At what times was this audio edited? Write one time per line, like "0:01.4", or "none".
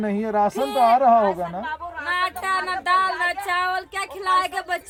none

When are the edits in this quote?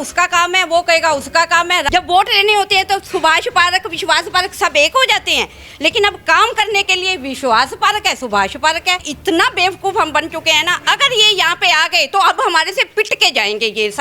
0:01.9
0:09.1

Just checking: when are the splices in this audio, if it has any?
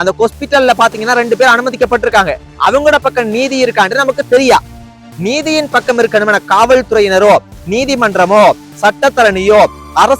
0:04.8

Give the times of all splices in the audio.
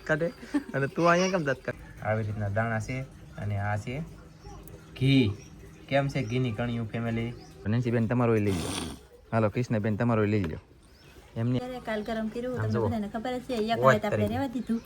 0:01.8
0:07.7
0:11.6

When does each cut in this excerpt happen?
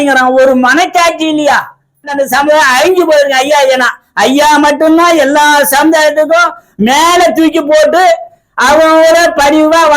0:02.1

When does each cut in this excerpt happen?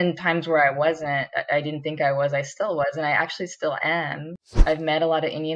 0:04.5

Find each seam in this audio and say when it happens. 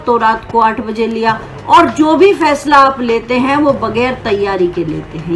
none

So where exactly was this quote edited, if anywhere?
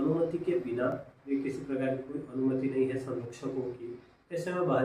0:01.3

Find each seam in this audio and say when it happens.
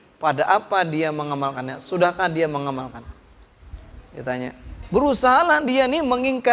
0:04.8

